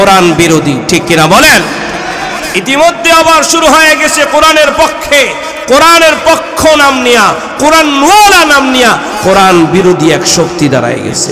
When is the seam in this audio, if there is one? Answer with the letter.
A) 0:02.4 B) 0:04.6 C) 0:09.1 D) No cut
C